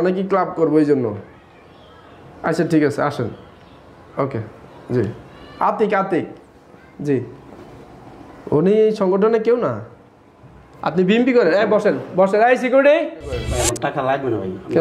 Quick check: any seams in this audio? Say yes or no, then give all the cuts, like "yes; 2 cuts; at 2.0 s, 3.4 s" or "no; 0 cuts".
yes; 1 cut; at 13.5 s